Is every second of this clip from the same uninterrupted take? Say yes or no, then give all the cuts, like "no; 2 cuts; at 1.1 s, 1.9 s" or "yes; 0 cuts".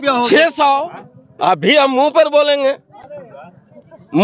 yes; 0 cuts